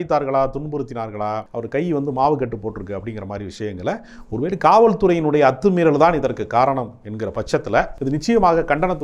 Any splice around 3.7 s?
no; 2 cuts; at 1.5 s, 7.9 s

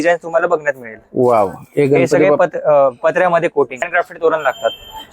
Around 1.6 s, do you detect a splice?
no; 1 cut; at 3.9 s

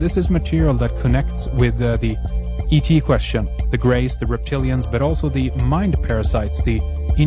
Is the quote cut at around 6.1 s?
no; 1 cut; at 4.5 s

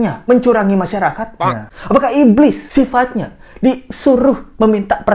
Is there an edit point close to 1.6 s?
yes; 1 cut; at 1.6 s

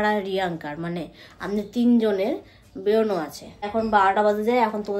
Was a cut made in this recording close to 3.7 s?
yes; 1 cut; at 3.7 s

